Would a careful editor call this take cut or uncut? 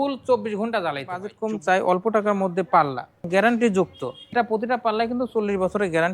cut